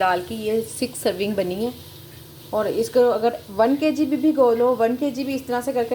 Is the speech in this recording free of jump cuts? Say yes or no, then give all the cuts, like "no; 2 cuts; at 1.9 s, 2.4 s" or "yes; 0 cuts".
yes; 0 cuts